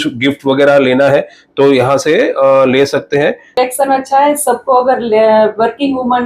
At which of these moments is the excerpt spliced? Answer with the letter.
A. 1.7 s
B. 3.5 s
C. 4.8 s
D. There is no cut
B